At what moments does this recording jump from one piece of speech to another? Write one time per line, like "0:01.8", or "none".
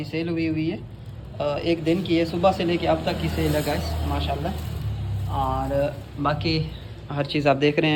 none